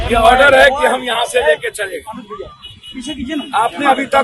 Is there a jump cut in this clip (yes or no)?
no